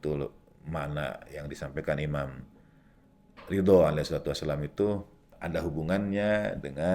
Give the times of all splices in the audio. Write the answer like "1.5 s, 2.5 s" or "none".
5.3 s